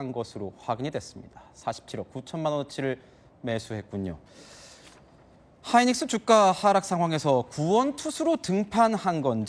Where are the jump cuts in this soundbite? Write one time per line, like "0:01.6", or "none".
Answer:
0:08.0